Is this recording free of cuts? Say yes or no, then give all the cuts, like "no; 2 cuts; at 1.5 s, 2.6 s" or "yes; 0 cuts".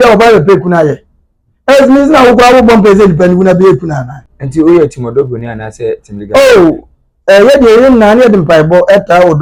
yes; 0 cuts